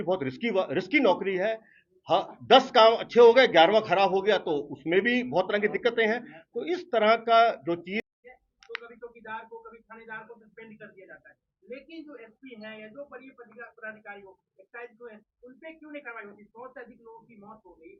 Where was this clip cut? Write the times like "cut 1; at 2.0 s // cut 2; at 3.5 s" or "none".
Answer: cut 1; at 8.1 s

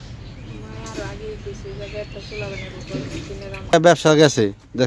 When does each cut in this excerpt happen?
cut 1; at 3.7 s

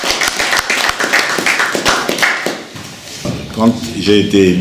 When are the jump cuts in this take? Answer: cut 1; at 3.3 s

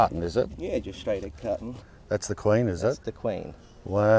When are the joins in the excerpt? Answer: cut 1; at 1.7 s

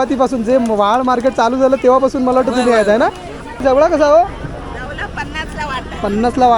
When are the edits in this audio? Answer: cut 1; at 3.5 s

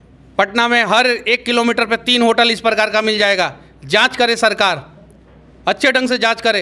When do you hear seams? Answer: none

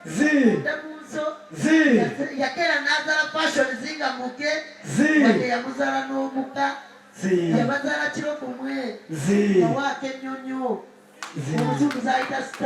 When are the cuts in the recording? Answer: none

